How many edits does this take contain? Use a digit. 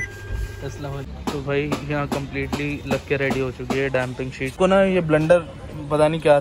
2